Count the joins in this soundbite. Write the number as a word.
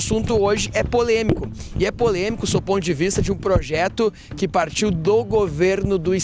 zero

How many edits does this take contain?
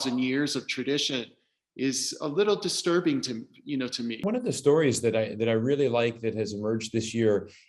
one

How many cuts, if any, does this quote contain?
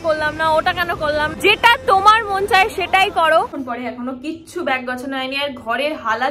two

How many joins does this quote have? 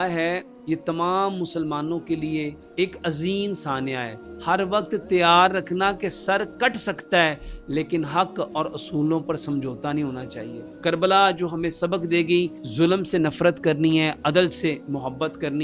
four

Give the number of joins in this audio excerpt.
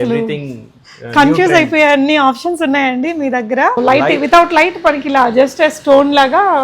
one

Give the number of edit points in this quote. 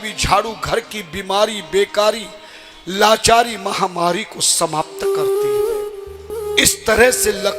one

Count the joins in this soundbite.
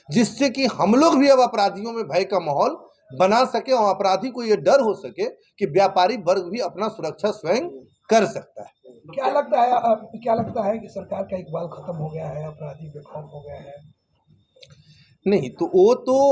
zero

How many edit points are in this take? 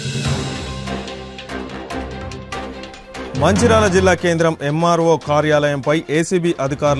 one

